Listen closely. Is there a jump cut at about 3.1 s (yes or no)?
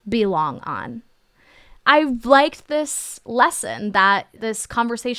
no